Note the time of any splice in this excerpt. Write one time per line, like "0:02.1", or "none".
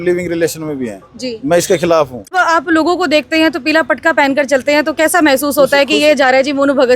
0:02.3